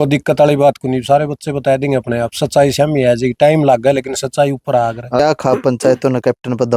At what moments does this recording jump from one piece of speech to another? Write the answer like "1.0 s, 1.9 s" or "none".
5.2 s